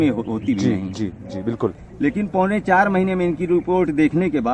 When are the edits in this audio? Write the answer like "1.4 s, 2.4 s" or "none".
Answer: 1.8 s